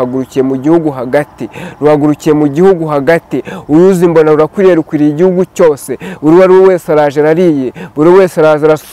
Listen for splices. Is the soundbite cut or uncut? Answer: uncut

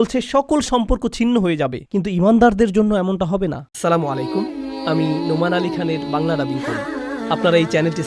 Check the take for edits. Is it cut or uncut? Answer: cut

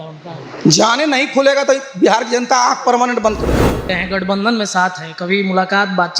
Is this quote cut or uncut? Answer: cut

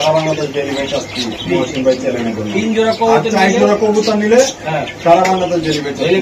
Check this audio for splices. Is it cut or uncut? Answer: uncut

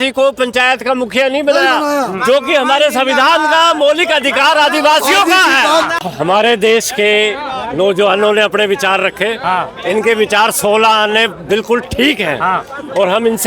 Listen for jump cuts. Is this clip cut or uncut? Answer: cut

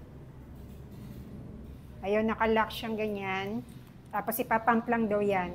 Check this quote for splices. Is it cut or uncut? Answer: cut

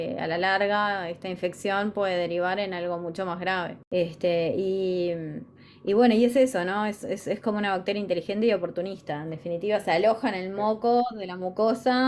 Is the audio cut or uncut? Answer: cut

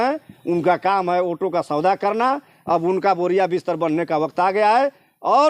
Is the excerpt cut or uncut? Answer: uncut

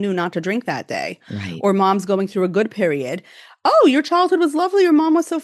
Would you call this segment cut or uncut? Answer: uncut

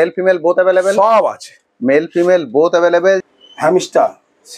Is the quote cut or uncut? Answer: cut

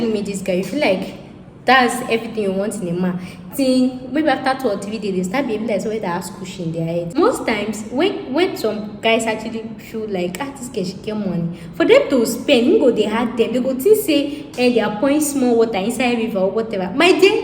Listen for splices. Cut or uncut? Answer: cut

